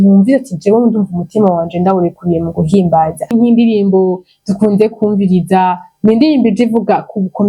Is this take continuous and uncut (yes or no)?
no